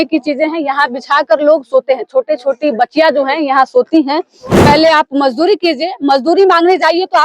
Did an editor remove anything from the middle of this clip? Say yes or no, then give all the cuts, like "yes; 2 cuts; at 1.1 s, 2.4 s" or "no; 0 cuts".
yes; 1 cut; at 4.5 s